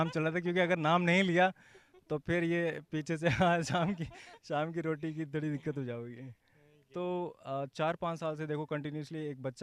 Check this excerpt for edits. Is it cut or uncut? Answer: uncut